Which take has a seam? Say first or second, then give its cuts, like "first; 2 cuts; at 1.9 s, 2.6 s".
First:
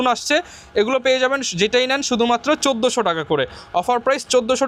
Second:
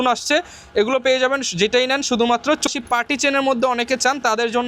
second; 1 cut; at 2.7 s